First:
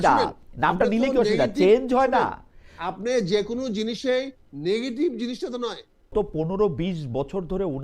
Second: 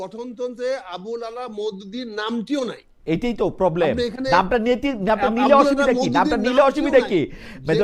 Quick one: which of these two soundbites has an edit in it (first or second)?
first